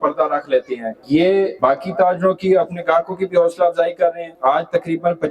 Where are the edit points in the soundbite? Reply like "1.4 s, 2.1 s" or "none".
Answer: 0.9 s, 1.5 s, 4.3 s